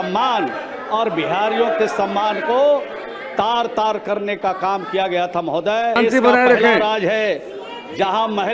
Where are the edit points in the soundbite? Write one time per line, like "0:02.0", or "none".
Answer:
0:06.0